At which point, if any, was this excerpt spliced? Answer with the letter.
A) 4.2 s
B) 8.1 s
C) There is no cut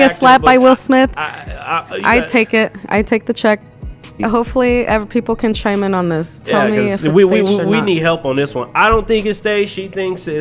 A